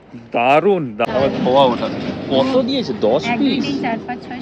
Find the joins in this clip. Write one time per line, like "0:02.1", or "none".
0:01.0